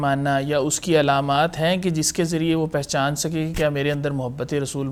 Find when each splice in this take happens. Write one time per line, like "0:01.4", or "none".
none